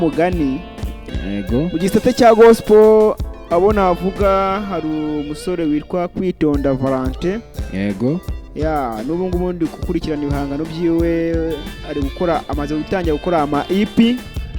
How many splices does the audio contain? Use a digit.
1